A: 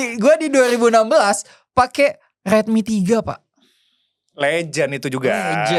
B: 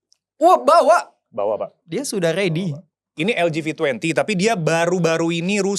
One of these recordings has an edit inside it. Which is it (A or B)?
B